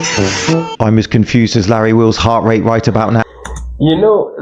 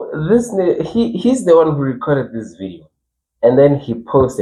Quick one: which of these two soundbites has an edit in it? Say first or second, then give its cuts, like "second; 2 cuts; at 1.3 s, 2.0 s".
first; 1 cut; at 3.2 s